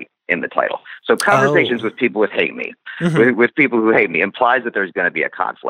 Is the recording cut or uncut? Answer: uncut